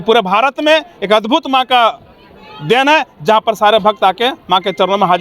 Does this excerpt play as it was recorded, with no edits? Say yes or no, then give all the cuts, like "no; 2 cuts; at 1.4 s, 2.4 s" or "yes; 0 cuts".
yes; 0 cuts